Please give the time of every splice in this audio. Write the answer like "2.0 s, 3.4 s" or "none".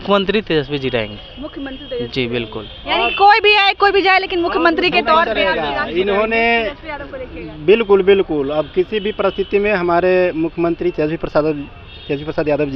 none